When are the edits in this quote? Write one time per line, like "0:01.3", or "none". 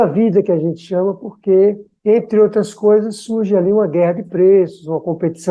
none